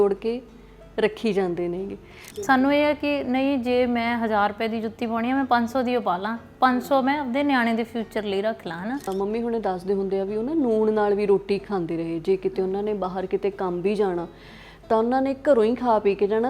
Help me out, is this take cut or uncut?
cut